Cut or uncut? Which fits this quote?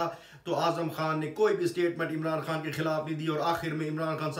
uncut